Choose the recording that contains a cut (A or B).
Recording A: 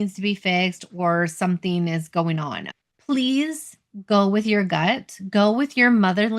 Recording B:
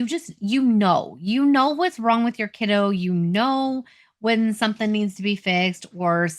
A